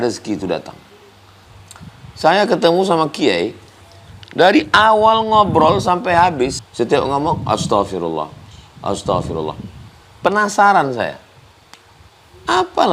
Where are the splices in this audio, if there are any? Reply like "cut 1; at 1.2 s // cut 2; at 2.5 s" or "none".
cut 1; at 1.5 s // cut 2; at 6.6 s